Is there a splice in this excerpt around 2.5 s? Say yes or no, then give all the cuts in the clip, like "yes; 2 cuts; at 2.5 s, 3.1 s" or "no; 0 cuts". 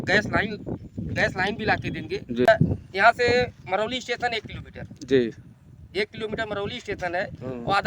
yes; 1 cut; at 2.5 s